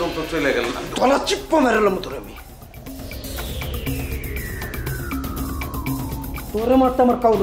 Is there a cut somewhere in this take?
yes; 1 cut; at 6.3 s

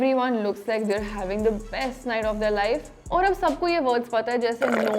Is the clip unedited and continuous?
no; 1 cut; at 2.9 s

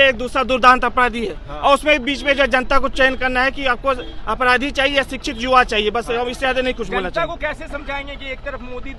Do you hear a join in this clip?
no; 0 cuts

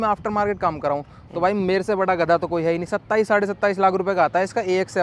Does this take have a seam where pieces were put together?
no; 0 cuts

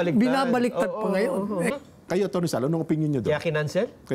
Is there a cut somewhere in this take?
yes; 1 cut; at 1.7 s

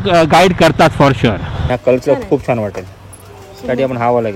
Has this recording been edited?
yes; 1 cut; at 1.5 s

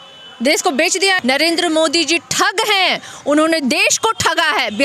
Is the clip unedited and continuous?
no; 1 cut; at 1.2 s

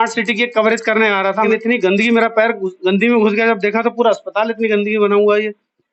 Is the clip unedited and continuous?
no; 1 cut; at 1.5 s

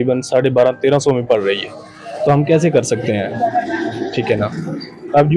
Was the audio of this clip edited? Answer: no; 0 cuts

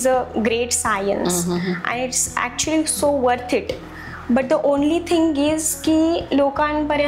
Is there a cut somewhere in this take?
no; 0 cuts

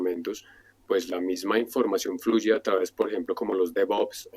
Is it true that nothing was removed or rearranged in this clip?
yes; 0 cuts

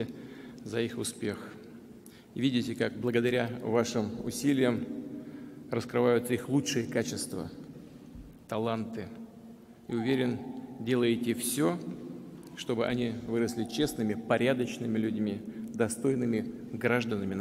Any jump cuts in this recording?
no; 0 cuts

